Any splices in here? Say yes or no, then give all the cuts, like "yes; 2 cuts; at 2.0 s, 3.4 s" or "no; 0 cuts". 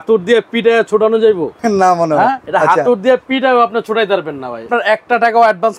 yes; 3 cuts; at 1.5 s, 2.4 s, 4.7 s